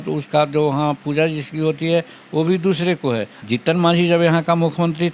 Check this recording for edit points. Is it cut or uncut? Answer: cut